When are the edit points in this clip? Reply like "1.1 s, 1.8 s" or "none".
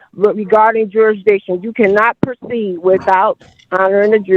none

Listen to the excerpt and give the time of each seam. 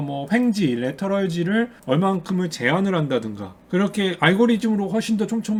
none

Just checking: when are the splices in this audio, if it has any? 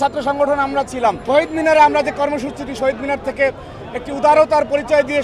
1.2 s

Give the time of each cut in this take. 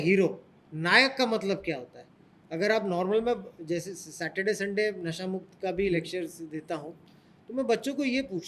none

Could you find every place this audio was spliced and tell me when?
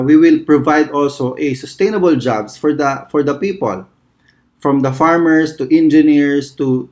none

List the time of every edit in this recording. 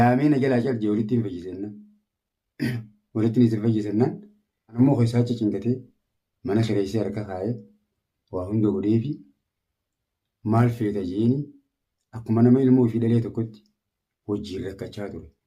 4.8 s

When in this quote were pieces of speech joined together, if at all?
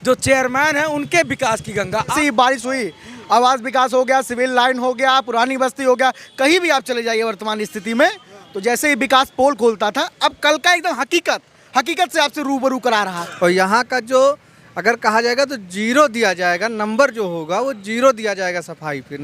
2.1 s, 13.2 s

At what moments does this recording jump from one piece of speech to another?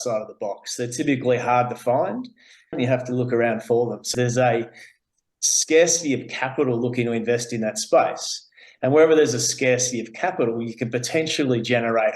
2.8 s, 4.1 s

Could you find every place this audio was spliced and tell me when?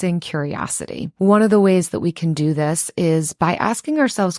1.1 s

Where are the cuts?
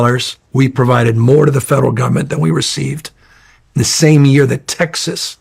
none

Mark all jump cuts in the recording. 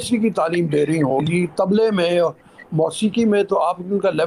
none

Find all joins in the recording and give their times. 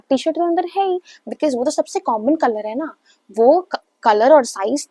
none

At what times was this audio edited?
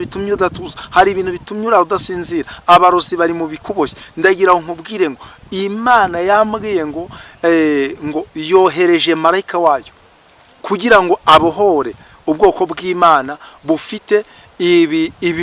none

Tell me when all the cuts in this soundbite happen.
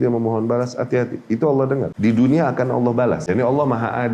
1.9 s, 3.2 s

